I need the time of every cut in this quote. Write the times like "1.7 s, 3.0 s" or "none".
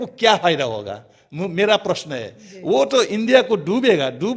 none